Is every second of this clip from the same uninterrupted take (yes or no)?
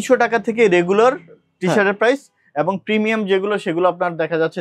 yes